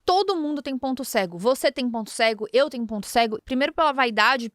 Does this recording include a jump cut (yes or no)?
yes